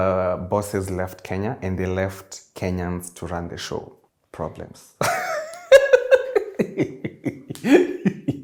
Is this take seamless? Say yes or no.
yes